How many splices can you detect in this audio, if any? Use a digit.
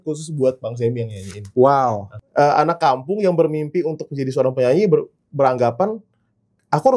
1